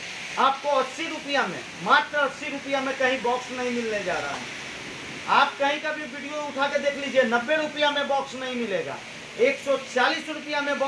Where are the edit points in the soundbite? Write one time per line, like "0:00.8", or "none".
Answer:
none